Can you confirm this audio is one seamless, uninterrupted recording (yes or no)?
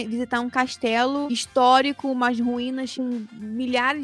yes